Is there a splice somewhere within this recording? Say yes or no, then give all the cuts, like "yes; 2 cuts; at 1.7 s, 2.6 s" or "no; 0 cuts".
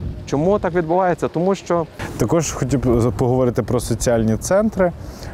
yes; 1 cut; at 2.0 s